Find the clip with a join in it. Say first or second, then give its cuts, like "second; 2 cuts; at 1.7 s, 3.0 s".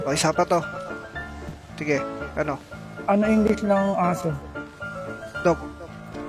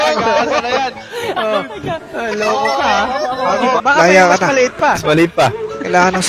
second; 1 cut; at 3.8 s